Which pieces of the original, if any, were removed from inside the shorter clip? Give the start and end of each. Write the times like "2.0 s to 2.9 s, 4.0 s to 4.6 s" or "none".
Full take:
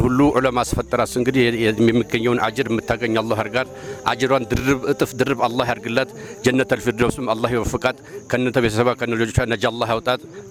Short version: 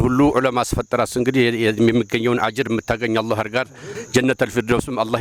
3.9 s to 6.2 s